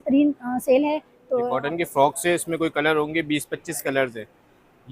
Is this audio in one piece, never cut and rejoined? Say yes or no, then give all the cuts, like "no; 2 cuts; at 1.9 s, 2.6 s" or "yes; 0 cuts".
no; 1 cut; at 1.4 s